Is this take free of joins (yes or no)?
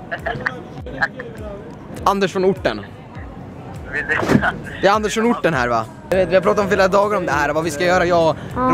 no